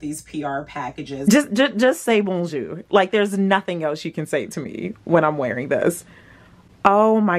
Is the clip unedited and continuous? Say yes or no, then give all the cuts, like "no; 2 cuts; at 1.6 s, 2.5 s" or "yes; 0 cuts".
no; 1 cut; at 1.1 s